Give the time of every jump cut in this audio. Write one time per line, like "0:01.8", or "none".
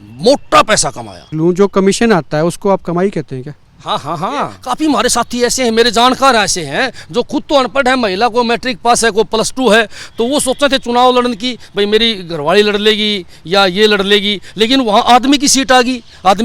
0:01.3
0:04.6